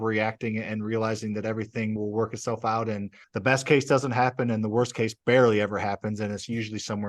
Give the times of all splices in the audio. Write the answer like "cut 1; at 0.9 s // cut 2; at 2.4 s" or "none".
cut 1; at 2.0 s // cut 2; at 3.2 s